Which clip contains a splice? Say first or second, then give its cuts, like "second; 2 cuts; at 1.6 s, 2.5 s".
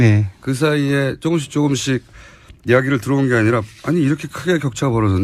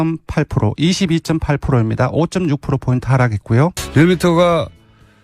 second; 1 cut; at 3.8 s